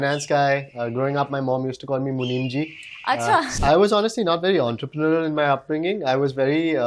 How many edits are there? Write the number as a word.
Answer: one